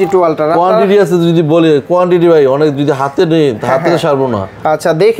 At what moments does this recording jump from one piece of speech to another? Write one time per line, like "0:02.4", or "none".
none